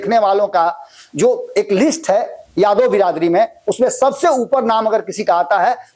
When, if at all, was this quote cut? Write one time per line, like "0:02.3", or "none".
none